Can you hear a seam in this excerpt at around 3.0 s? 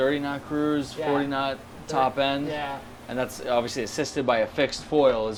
no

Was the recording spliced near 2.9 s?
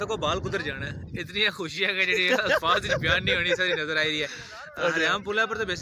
no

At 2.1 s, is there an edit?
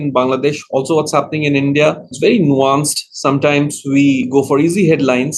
yes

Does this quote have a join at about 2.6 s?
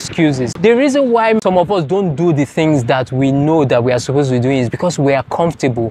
no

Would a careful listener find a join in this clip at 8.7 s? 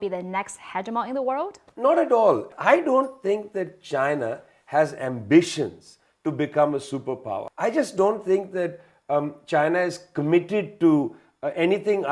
no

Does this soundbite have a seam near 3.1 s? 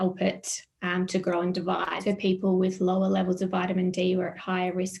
no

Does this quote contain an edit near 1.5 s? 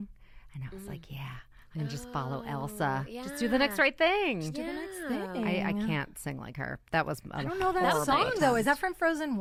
no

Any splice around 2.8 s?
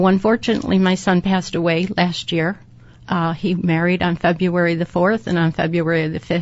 no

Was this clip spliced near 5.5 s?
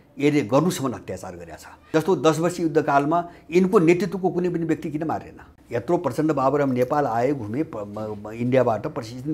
yes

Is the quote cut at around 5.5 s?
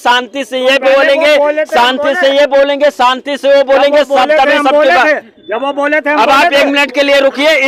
no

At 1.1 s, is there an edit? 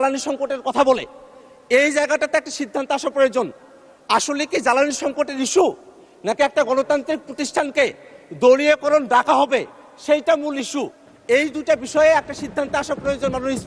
no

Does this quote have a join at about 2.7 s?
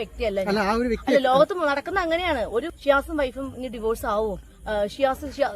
yes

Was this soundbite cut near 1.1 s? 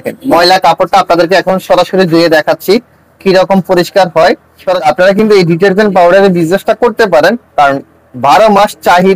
no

